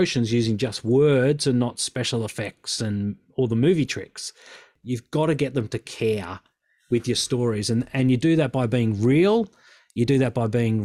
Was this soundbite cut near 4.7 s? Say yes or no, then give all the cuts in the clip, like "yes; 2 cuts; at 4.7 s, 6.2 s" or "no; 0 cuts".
yes; 1 cut; at 4.7 s